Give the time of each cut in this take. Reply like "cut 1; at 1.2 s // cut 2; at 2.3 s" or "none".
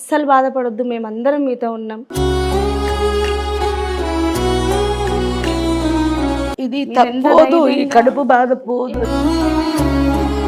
none